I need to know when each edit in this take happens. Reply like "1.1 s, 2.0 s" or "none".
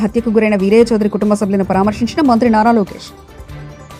none